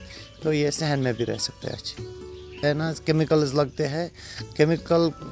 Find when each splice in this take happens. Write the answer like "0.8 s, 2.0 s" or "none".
2.5 s